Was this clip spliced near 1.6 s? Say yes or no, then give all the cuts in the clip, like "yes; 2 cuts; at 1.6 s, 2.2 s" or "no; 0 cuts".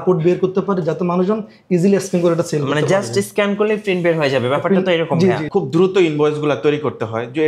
no; 1 cut; at 5.4 s